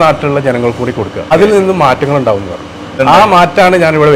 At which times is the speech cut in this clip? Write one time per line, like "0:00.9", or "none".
0:01.3
0:02.9

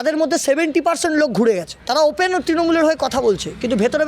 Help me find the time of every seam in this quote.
0:01.7

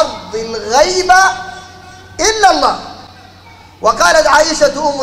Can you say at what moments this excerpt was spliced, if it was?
none

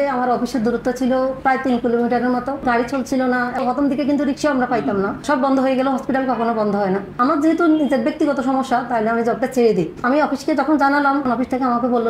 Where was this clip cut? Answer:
0:02.6
0:03.6
0:05.2
0:07.1
0:10.0
0:11.2

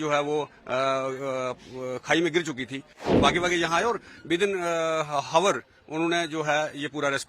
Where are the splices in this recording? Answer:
0:02.9

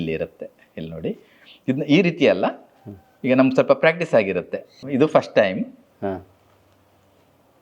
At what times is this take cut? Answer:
0:04.8

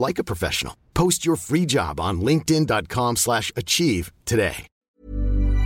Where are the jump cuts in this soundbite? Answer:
0:04.7

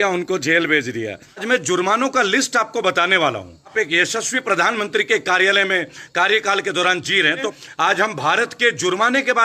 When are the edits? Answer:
0:01.4
0:03.7
0:07.6

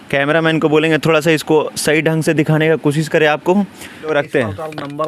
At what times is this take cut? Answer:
0:04.1

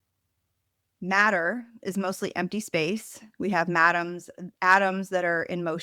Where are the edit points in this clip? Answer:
none

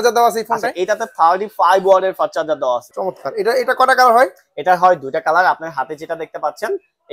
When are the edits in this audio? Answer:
0:02.9

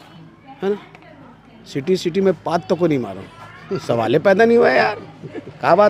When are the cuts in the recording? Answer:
none

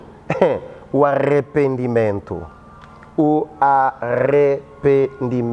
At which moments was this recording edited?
none

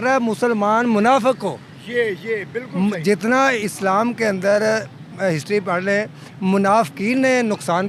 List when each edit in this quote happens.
none

